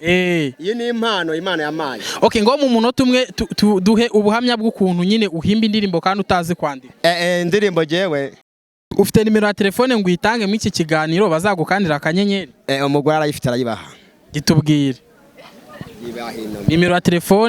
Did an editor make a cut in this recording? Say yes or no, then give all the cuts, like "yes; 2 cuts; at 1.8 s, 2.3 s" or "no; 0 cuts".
yes; 1 cut; at 8.9 s